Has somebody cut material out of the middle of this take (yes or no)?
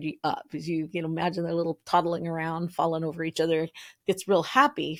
no